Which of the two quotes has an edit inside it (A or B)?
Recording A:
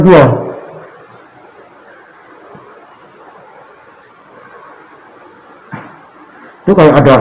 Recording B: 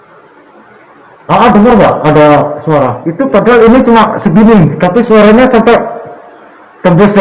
B